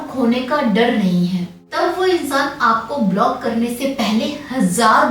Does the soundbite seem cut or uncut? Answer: cut